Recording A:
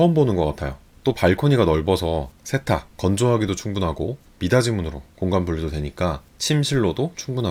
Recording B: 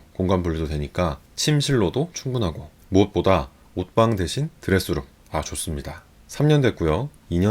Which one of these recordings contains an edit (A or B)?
B